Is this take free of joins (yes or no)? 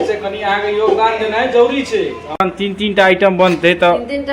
no